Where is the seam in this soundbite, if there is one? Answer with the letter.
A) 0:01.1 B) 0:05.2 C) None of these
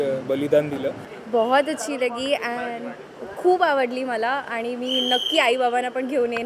A